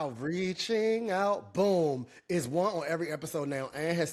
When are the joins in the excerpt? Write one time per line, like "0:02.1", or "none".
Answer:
none